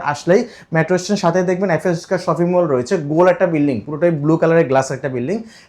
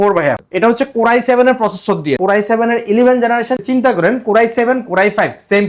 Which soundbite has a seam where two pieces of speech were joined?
second; 2 cuts; at 2.2 s, 3.6 s

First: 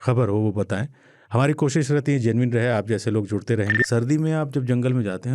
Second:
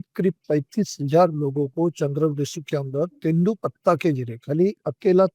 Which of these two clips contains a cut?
first; 1 cut; at 3.8 s

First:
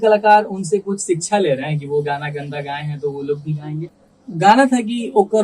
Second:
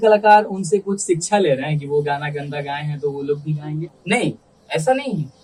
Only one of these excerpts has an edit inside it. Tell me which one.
first; 1 cut; at 4.0 s

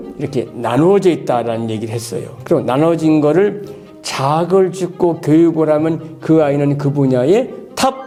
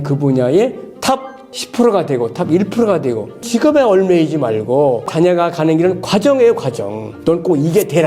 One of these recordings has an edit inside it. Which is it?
second; 1 cut; at 3.3 s

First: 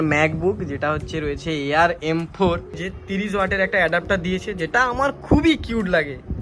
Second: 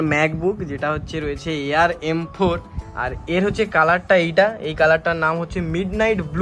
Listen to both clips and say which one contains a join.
first; 1 cut; at 2.9 s

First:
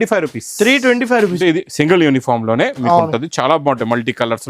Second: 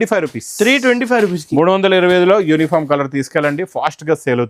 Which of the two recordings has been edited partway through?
first; 1 cut; at 1.4 s

